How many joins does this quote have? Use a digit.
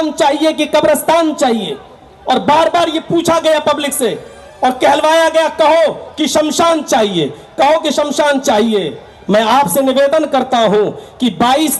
0